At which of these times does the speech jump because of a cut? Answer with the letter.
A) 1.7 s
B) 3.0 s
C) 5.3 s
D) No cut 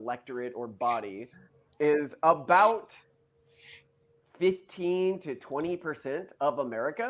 D